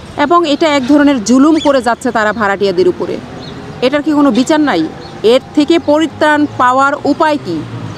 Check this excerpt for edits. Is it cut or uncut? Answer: uncut